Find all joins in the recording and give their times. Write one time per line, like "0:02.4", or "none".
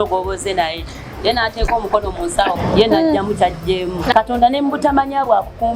0:02.6
0:04.1